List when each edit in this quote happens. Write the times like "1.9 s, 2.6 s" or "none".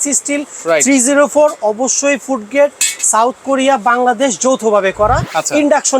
none